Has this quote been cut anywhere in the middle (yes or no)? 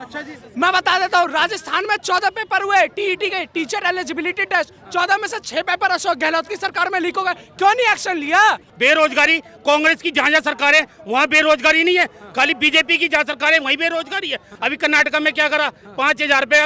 yes